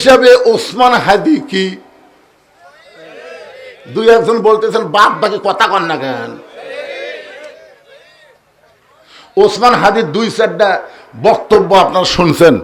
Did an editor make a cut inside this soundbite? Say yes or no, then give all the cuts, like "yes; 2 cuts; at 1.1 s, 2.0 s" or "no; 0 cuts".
no; 0 cuts